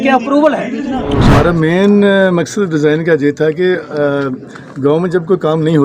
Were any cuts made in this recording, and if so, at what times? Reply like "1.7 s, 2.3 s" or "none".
1.2 s